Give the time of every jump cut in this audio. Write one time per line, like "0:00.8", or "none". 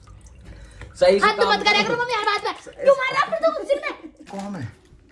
0:04.2